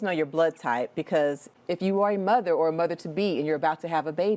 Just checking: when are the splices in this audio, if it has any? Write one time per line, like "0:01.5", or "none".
0:01.5